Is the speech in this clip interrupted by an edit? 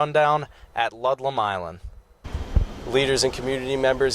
yes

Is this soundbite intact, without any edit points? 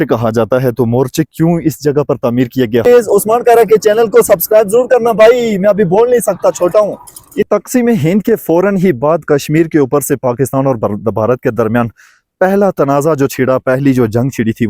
no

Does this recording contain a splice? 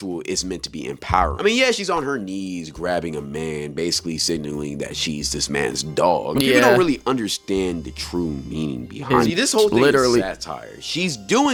no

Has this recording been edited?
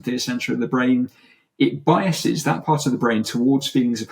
no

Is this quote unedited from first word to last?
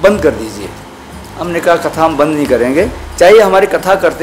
no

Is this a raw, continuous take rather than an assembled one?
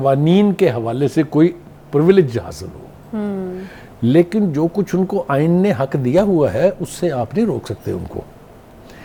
yes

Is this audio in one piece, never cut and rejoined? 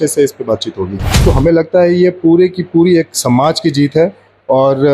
no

